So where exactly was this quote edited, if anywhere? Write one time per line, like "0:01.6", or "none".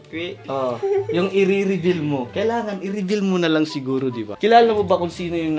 0:02.3
0:04.3